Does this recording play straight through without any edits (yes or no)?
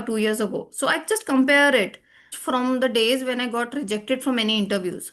no